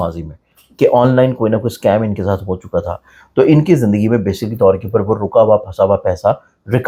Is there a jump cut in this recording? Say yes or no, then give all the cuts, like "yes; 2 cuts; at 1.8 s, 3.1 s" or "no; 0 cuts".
no; 0 cuts